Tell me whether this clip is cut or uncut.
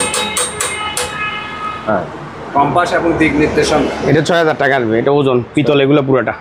uncut